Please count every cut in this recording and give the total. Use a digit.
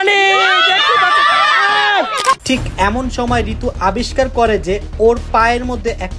1